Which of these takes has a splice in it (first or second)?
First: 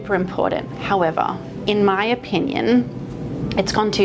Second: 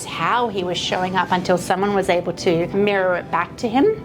second